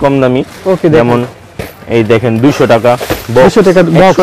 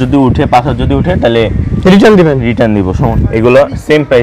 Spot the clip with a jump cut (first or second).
second